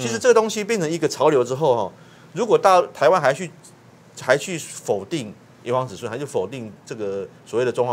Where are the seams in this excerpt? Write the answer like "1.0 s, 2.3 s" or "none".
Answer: none